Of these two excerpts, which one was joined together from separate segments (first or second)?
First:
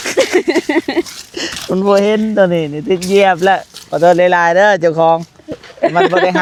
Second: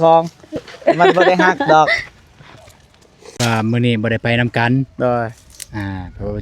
second